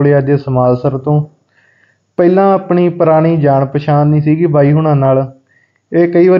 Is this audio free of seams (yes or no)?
no